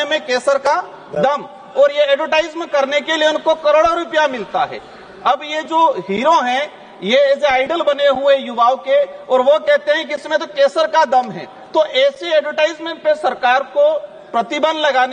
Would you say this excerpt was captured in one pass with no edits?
yes; 0 cuts

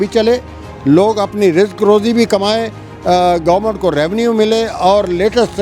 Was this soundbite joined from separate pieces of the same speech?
no; 0 cuts

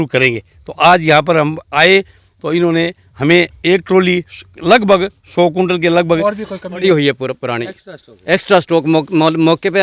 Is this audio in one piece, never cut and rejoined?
no; 1 cut; at 6.8 s

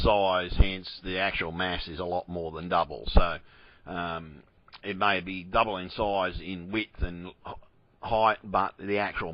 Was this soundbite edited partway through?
yes; 1 cut; at 5.8 s

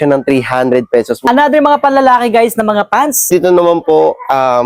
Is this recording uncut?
no; 1 cut; at 1.2 s

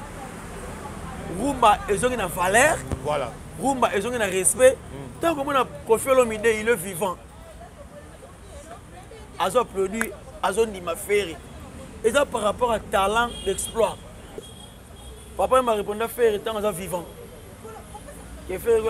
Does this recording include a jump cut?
yes; 1 cut; at 14.5 s

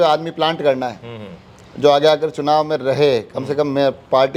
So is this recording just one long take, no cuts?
yes; 0 cuts

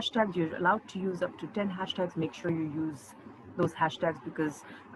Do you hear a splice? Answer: no; 0 cuts

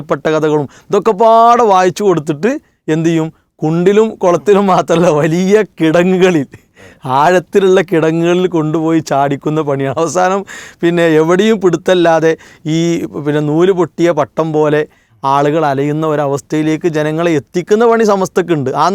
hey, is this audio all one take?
yes; 0 cuts

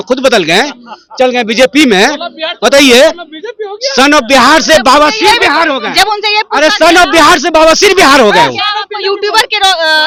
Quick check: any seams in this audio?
no; 0 cuts

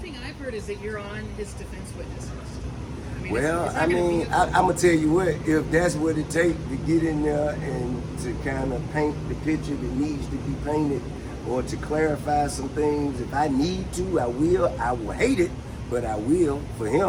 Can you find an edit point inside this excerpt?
no; 0 cuts

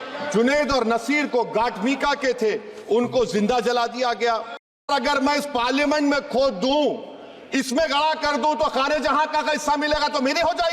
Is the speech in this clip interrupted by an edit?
yes; 1 cut; at 4.9 s

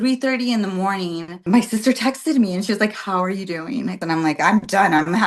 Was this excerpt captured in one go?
no; 2 cuts; at 1.4 s, 4.0 s

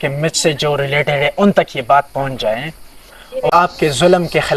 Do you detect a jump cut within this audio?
yes; 1 cut; at 3.5 s

